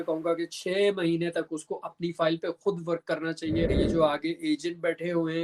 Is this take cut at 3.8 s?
yes; 1 cut; at 3.8 s

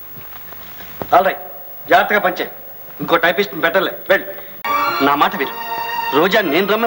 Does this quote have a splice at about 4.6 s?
yes; 1 cut; at 4.6 s

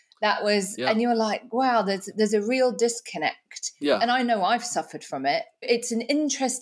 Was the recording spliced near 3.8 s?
yes; 2 cuts; at 3.8 s, 5.7 s

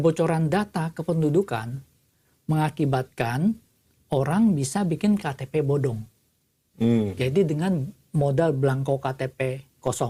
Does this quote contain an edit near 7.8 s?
no; 0 cuts

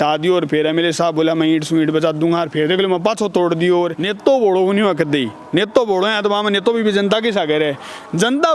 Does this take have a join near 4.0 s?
yes; 1 cut; at 4.0 s

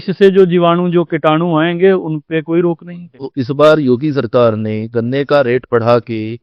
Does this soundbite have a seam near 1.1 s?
no; 1 cut; at 3.3 s

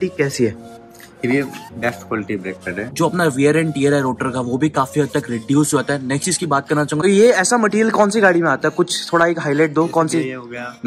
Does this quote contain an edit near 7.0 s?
yes; 2 cuts; at 2.9 s, 7.0 s

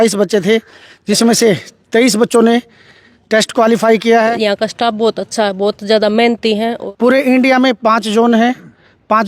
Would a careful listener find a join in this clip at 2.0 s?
no; 2 cuts; at 4.3 s, 6.8 s

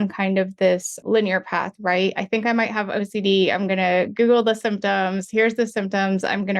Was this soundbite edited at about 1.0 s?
yes; 1 cut; at 1.0 s

